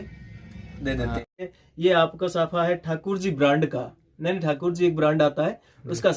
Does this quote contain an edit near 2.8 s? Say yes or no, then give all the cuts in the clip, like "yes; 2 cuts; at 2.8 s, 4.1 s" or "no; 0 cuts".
no; 1 cut; at 1.4 s